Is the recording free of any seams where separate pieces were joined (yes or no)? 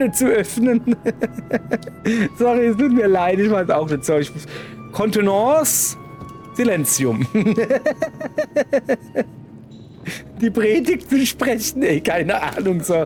yes